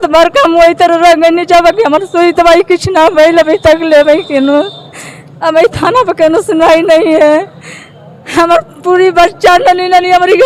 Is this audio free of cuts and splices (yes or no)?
yes